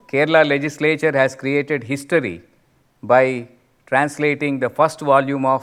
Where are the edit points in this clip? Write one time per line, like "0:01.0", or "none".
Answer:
none